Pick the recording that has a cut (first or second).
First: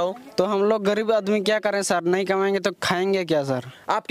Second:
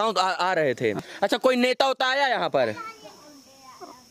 second